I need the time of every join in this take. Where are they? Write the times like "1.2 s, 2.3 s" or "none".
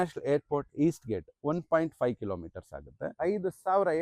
3.0 s